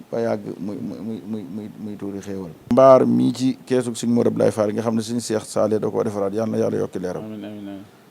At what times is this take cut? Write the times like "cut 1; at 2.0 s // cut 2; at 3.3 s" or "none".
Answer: cut 1; at 2.7 s